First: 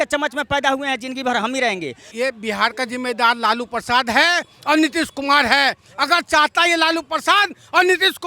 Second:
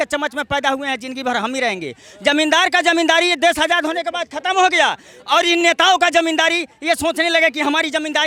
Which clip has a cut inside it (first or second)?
first